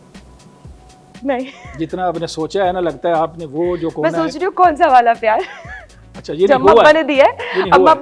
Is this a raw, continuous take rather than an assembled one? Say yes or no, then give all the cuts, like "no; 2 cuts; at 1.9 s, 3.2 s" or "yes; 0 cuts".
yes; 0 cuts